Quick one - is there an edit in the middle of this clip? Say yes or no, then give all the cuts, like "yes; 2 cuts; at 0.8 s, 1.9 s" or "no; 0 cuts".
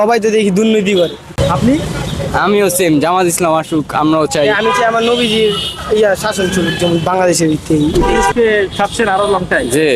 yes; 2 cuts; at 1.3 s, 8.3 s